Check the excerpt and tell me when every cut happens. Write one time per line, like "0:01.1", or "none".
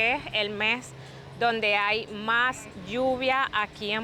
none